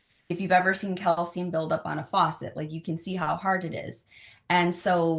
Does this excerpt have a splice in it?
no; 0 cuts

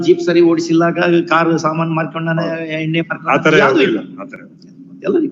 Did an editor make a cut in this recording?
no; 0 cuts

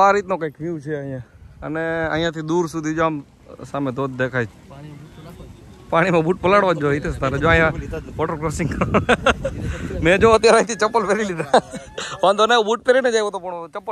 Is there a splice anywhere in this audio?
no; 0 cuts

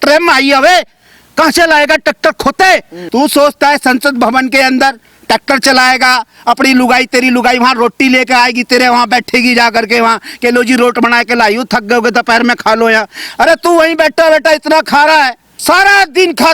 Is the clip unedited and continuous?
no; 2 cuts; at 3.0 s, 15.5 s

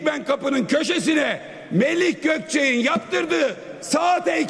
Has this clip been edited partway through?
no; 0 cuts

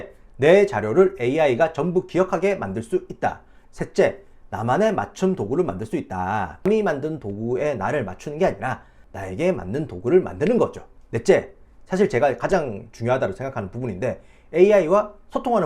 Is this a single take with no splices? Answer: no; 2 cuts; at 3.5 s, 6.6 s

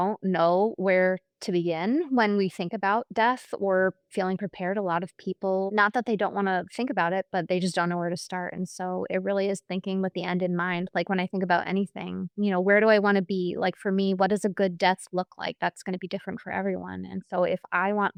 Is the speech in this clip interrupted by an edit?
no; 0 cuts

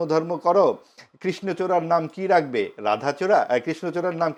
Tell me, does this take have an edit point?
no; 0 cuts

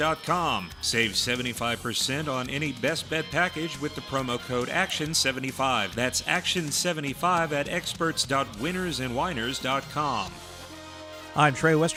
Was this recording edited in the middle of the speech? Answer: no; 0 cuts

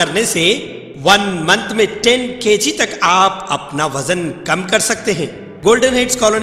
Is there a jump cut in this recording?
yes; 1 cut; at 5.4 s

